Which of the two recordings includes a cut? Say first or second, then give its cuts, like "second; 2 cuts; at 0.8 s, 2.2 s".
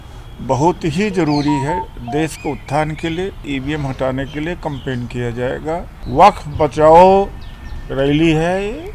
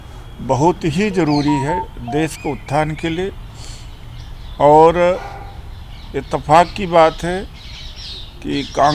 first; 2 cuts; at 3.4 s, 5.9 s